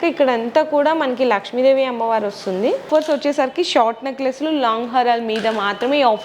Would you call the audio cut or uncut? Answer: cut